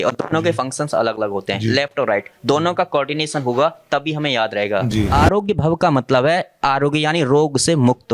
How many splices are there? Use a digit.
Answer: 1